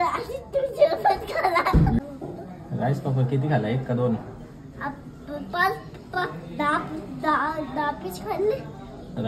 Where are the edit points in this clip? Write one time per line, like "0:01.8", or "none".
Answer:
0:02.0